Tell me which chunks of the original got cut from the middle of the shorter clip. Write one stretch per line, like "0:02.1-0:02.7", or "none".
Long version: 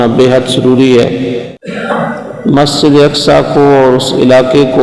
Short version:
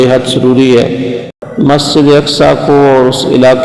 0:01.6-0:02.3